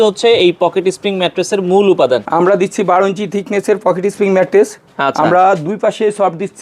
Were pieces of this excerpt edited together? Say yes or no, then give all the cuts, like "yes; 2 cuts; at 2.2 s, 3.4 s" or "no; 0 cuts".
yes; 1 cut; at 2.3 s